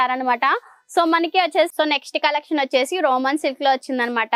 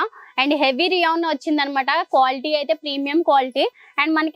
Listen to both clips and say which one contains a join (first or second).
first